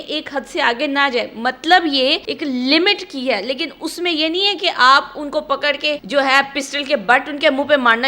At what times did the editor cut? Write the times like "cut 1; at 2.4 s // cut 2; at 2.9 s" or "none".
cut 1; at 2.3 s // cut 2; at 6.0 s